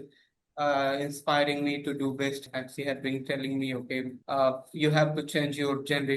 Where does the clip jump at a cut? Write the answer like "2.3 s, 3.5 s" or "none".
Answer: 2.5 s, 4.2 s